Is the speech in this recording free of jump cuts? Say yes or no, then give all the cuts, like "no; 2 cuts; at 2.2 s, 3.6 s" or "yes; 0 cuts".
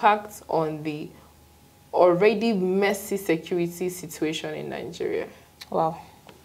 yes; 0 cuts